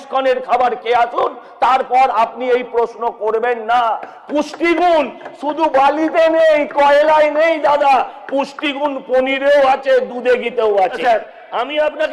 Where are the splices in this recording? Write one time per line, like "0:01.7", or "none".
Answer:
none